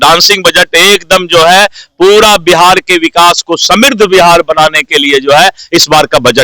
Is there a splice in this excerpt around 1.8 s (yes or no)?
no